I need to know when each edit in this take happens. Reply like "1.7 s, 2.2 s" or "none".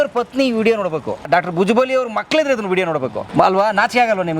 1.3 s, 3.2 s